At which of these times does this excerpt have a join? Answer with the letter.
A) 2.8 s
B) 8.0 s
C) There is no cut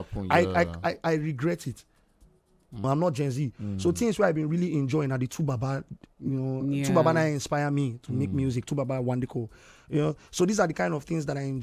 A